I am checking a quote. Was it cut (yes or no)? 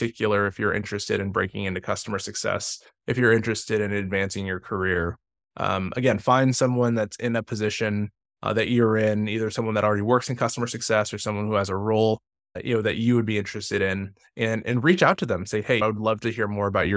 no